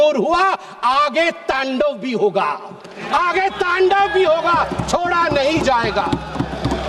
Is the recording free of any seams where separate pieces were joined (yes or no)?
yes